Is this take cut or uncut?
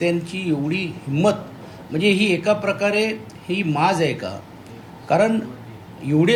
uncut